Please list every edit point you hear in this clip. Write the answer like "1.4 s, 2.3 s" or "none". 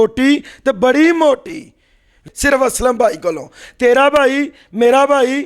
2.2 s